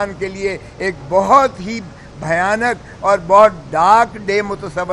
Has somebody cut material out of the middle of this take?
no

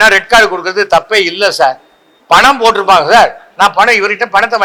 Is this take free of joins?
yes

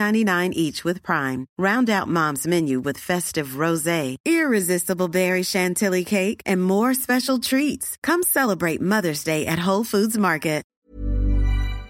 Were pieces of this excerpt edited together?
yes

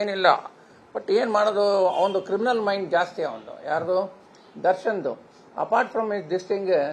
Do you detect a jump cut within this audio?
yes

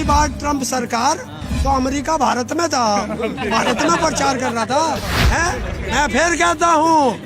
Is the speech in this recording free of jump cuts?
no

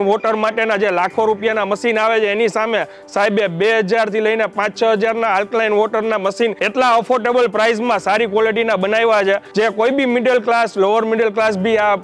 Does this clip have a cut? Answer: yes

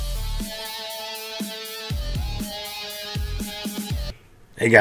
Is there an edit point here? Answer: yes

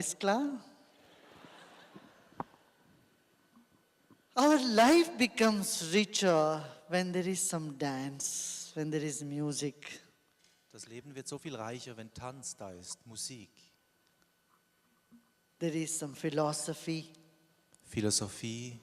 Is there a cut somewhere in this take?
yes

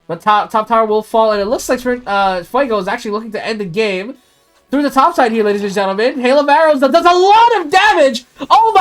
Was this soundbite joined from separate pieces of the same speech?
no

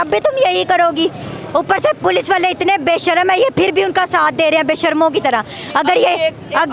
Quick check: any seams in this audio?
no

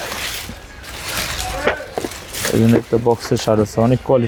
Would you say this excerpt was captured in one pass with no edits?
yes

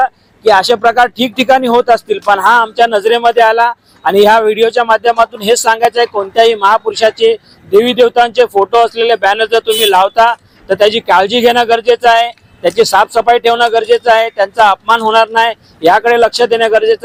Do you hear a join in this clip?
no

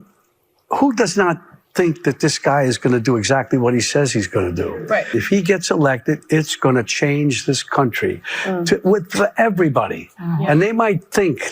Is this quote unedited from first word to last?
no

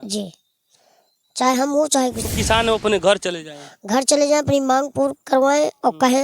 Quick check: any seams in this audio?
yes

